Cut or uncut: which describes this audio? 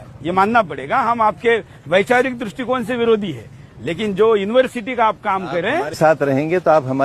uncut